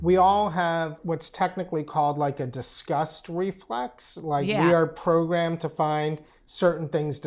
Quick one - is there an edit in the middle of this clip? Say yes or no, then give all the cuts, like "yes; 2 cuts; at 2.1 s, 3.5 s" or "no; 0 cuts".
yes; 1 cut; at 1.0 s